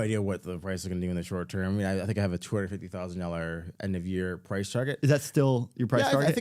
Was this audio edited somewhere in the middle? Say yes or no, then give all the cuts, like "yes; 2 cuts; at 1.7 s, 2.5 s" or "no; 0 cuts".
no; 0 cuts